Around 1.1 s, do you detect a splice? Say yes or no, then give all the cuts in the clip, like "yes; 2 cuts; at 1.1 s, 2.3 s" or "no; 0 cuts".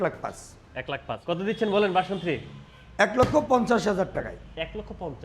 yes; 1 cut; at 1.1 s